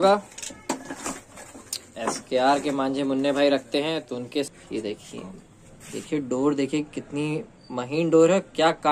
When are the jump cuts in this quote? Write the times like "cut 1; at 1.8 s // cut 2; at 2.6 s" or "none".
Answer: cut 1; at 4.5 s